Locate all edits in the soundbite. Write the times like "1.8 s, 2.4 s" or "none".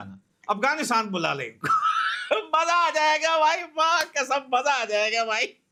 none